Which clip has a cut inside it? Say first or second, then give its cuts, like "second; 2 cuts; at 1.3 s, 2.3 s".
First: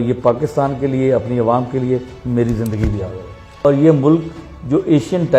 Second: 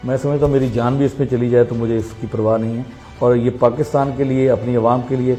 first; 1 cut; at 3.6 s